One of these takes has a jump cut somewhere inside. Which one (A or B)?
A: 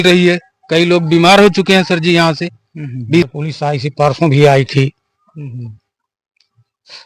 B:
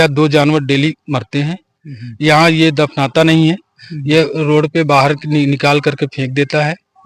A